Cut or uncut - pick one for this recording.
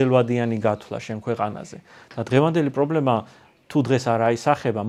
uncut